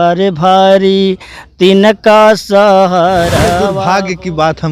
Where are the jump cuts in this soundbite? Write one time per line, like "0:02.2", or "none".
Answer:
0:03.6